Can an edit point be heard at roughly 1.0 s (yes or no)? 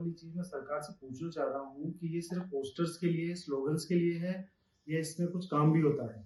no